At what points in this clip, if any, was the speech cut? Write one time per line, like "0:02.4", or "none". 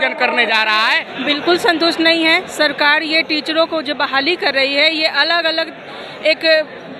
0:01.1